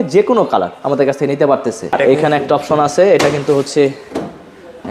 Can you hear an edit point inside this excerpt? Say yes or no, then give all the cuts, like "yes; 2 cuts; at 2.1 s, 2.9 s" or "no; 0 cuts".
yes; 1 cut; at 1.9 s